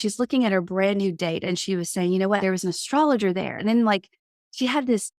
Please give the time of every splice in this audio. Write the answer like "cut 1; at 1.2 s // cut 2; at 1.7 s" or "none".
cut 1; at 1.5 s // cut 2; at 2.4 s // cut 3; at 3.6 s